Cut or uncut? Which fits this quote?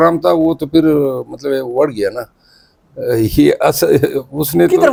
uncut